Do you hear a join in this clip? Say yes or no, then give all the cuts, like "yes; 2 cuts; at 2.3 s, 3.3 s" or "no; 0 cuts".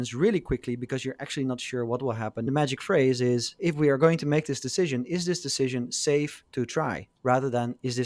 yes; 3 cuts; at 2.5 s, 3.6 s, 7.1 s